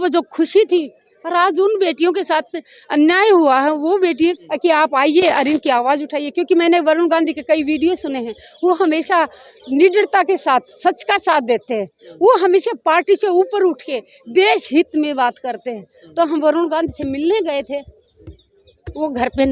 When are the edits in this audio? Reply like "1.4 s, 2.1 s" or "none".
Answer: 4.4 s